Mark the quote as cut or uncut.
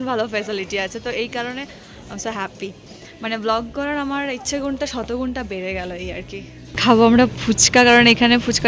cut